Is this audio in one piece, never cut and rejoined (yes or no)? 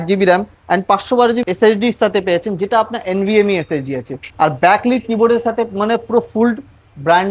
no